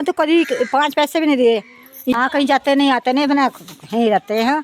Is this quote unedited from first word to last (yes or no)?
no